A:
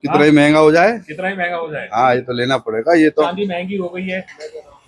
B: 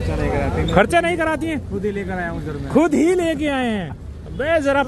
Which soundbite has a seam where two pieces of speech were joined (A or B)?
A